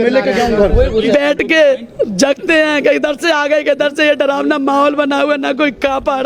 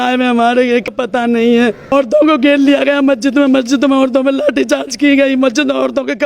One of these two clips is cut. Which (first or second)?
second